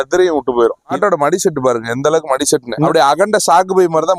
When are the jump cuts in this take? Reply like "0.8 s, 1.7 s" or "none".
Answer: 0.9 s, 2.8 s